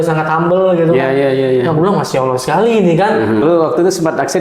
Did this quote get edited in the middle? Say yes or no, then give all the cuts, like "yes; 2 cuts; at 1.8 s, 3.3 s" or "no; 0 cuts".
yes; 1 cut; at 3.4 s